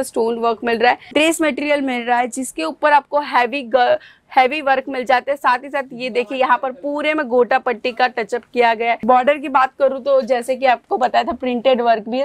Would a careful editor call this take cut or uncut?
cut